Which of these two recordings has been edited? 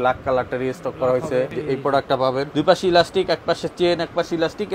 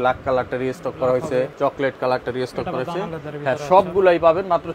first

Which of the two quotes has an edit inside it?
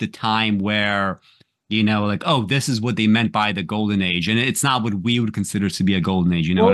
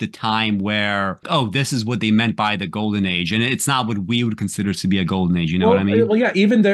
second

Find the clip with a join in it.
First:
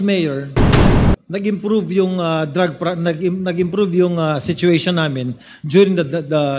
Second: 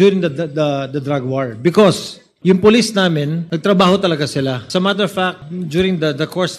second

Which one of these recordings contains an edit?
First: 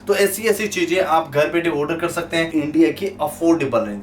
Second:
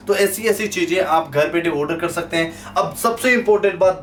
first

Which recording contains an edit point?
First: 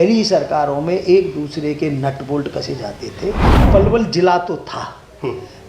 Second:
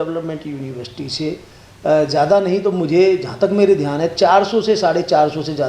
first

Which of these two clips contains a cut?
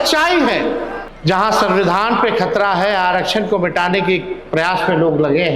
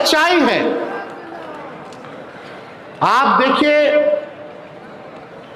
first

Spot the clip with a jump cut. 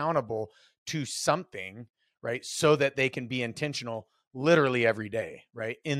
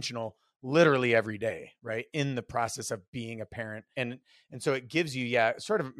second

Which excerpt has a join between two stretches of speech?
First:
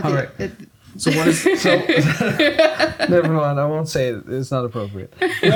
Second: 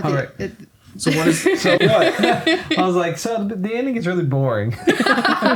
second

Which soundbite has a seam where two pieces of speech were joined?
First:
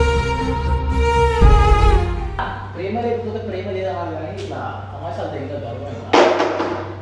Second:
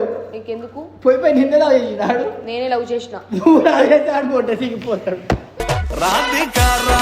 first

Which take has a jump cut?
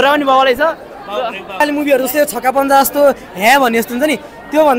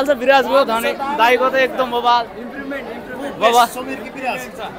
first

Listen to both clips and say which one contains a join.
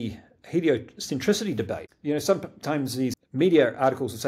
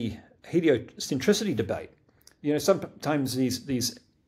first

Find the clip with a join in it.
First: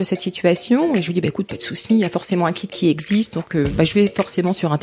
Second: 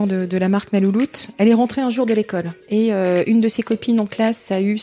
second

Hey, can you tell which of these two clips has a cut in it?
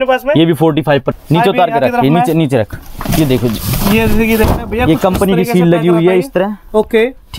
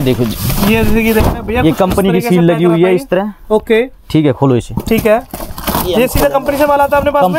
first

